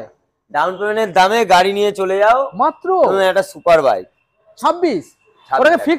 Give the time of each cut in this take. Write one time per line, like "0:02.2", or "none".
none